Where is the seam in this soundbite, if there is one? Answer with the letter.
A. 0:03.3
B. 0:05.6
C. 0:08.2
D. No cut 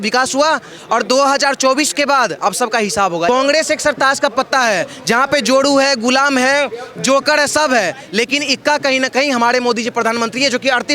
A